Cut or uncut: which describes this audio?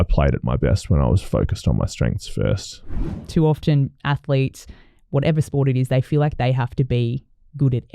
cut